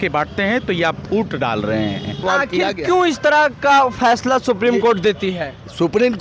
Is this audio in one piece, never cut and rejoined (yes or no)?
no